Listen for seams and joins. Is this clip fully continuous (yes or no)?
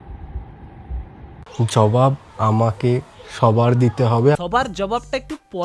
yes